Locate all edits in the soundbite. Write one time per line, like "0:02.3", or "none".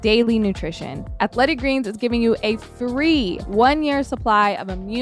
0:01.2
0:03.4

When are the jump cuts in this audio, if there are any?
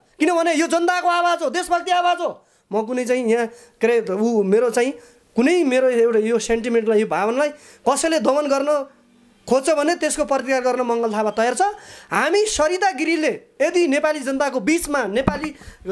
none

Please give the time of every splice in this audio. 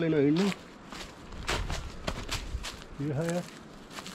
none

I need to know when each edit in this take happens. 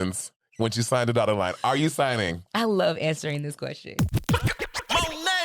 0:04.1

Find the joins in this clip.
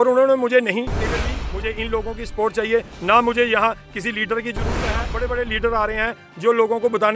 0:01.1
0:04.7

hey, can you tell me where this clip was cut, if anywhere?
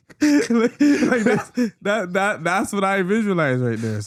none

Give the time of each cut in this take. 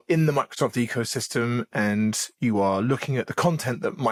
none

